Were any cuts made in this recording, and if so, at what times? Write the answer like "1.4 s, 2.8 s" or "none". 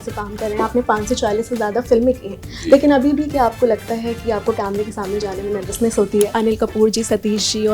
6.3 s